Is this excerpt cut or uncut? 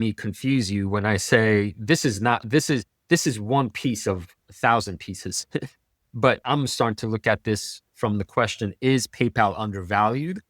uncut